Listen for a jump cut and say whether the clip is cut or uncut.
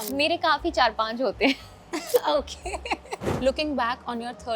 cut